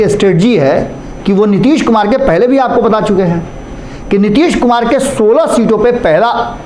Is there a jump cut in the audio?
no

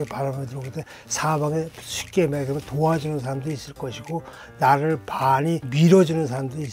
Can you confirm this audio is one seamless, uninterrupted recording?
no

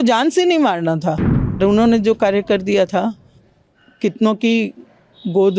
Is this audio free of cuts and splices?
no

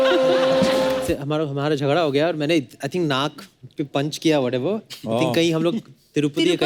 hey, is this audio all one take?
no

